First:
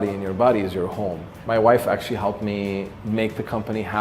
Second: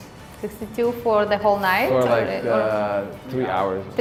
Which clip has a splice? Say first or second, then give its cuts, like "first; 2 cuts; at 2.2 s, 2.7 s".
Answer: first; 2 cuts; at 1.3 s, 2.9 s